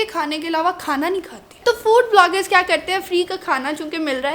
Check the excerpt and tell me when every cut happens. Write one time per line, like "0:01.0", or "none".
0:01.6